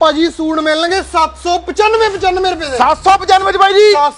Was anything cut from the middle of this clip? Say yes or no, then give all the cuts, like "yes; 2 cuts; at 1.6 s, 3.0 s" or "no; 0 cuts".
no; 0 cuts